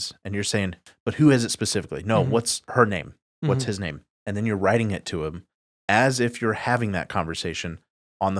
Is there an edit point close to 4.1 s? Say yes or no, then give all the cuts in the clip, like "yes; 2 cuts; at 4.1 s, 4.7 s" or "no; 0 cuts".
yes; 2 cuts; at 2.7 s, 4.1 s